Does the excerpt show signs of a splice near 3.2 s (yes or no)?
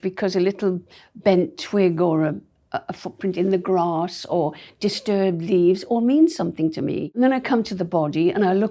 no